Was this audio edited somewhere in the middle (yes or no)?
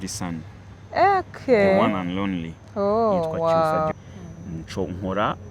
yes